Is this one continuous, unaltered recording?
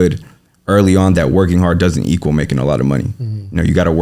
yes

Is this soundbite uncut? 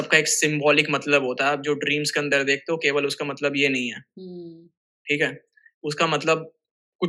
yes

